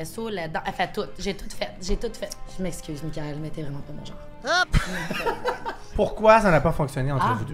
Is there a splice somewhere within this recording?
yes; 2 cuts; at 2.4 s, 5.8 s

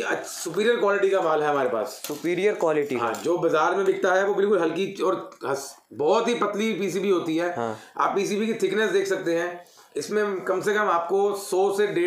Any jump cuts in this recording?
no; 0 cuts

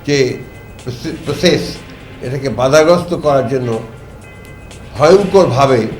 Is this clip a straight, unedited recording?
yes; 0 cuts

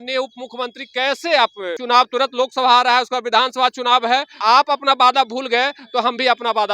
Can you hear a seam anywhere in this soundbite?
yes; 2 cuts; at 1.7 s, 4.4 s

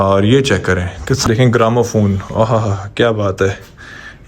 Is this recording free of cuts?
no; 1 cut; at 1.3 s

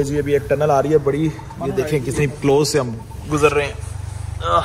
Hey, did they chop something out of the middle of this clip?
no; 0 cuts

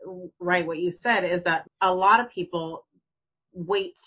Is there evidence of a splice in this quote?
yes; 1 cut; at 1.7 s

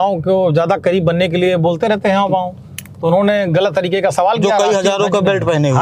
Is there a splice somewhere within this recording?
no; 0 cuts

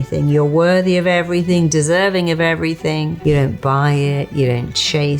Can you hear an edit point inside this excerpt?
yes; 1 cut; at 3.1 s

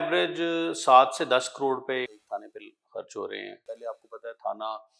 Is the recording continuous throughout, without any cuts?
no; 2 cuts; at 2.2 s, 3.7 s

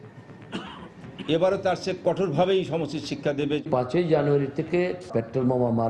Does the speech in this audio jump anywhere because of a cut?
yes; 2 cuts; at 3.6 s, 5.0 s

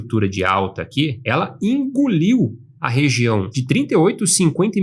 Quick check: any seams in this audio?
yes; 2 cuts; at 1.2 s, 3.5 s

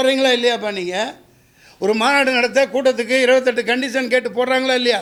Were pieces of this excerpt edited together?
no; 0 cuts

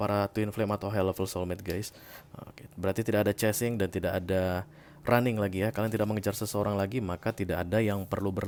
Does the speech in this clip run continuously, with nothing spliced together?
yes; 0 cuts

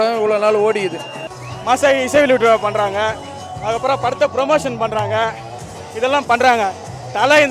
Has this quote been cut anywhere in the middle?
yes; 1 cut; at 1.2 s

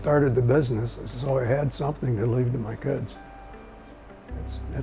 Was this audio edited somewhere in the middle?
no; 0 cuts

